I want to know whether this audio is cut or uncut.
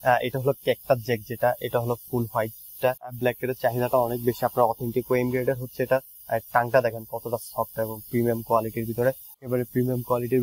cut